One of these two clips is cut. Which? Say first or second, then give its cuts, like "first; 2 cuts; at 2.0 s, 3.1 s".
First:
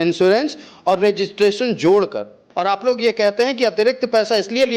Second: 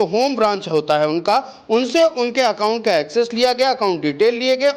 first; 1 cut; at 2.4 s